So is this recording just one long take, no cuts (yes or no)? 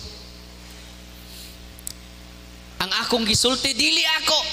yes